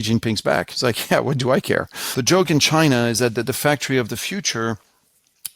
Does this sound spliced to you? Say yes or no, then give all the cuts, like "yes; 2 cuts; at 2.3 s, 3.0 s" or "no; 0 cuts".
yes; 1 cut; at 2.0 s